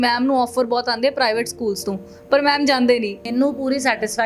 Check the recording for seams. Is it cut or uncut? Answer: cut